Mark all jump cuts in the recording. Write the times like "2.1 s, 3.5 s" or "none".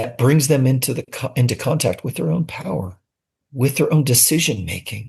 3.4 s